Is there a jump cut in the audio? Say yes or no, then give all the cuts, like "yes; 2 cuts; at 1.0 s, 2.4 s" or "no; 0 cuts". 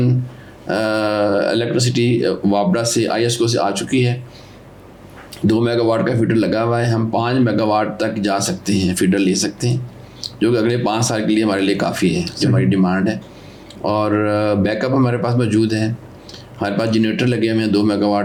no; 0 cuts